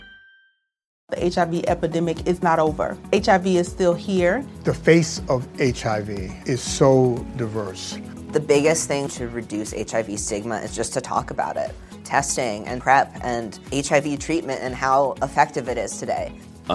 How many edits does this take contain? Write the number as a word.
one